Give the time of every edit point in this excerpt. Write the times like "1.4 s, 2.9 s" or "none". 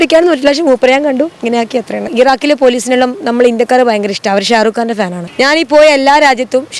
2.1 s, 5.2 s